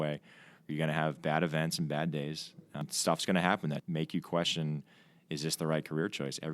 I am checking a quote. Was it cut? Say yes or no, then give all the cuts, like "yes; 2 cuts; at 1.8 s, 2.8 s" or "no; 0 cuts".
yes; 2 cuts; at 2.4 s, 3.8 s